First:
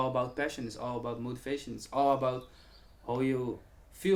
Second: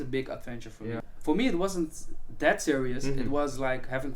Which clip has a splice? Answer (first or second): second